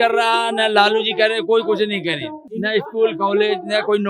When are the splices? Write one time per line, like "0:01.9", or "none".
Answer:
0:02.4